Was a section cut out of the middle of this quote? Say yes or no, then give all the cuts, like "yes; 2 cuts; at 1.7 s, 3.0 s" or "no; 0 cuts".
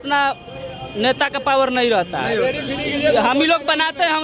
no; 0 cuts